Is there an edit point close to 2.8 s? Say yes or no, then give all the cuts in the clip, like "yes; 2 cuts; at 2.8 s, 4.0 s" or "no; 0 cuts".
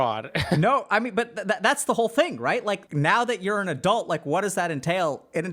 yes; 1 cut; at 2.8 s